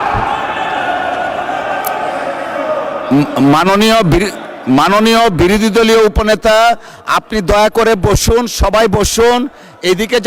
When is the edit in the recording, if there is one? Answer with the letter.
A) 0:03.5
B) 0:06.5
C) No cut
C